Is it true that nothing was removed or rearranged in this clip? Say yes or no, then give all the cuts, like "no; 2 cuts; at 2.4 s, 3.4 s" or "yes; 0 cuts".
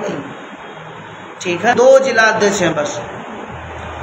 no; 1 cut; at 1.7 s